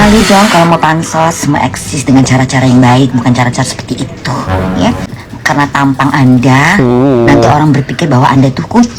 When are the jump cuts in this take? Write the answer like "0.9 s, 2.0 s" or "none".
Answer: 5.1 s